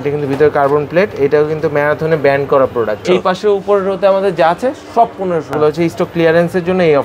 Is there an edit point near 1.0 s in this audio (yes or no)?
no